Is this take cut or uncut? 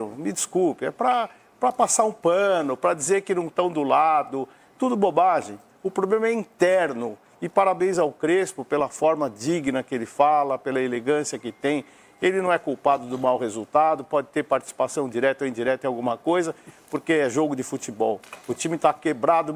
uncut